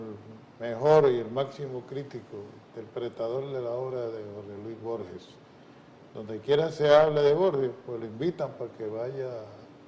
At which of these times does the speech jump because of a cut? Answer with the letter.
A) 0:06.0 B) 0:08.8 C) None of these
A